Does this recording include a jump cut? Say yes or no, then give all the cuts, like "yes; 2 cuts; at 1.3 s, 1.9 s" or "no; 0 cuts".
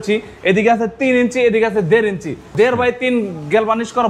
yes; 1 cut; at 2.5 s